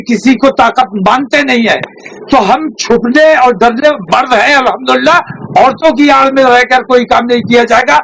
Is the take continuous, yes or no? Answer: yes